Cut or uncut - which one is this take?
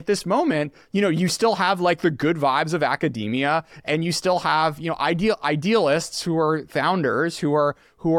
uncut